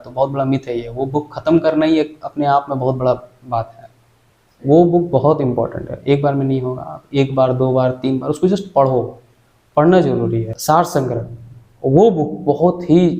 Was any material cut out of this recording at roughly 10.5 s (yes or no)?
yes